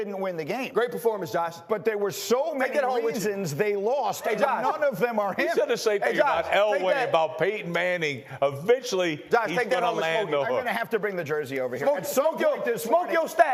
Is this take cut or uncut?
uncut